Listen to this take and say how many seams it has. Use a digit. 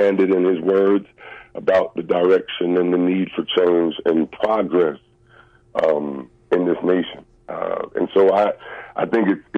0